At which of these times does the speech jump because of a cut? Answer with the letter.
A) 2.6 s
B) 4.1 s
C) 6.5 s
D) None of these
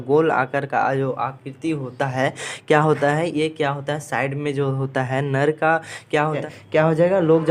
C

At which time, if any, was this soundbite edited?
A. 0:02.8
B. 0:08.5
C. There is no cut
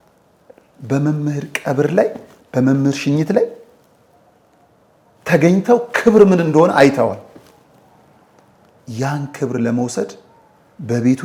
C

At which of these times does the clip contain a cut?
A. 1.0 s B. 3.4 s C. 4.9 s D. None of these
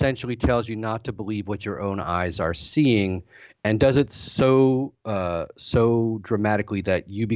D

